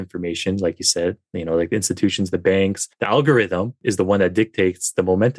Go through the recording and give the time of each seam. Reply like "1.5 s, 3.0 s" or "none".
2.9 s, 3.8 s